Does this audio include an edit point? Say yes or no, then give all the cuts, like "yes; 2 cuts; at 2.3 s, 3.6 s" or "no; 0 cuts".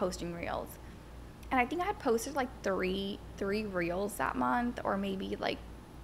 no; 0 cuts